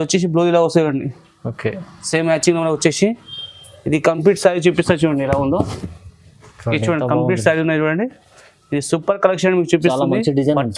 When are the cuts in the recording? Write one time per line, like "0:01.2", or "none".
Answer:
none